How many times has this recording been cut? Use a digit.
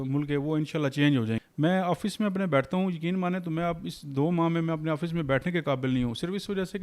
1